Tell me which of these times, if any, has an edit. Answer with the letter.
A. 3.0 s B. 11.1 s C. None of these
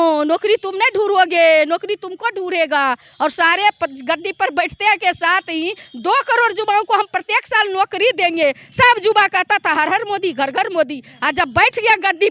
C